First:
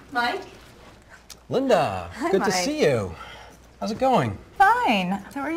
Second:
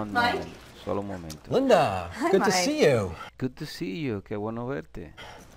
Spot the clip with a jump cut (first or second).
first